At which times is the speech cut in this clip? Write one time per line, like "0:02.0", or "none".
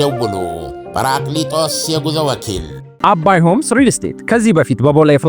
0:02.8